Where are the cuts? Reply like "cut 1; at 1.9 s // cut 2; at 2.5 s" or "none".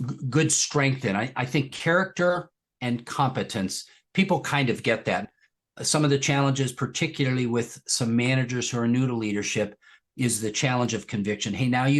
cut 1; at 5.3 s